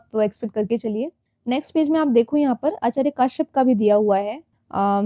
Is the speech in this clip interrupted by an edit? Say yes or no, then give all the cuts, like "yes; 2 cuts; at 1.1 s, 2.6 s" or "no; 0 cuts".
yes; 1 cut; at 1.3 s